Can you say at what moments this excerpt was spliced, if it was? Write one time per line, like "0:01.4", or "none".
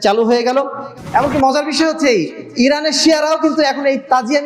0:01.0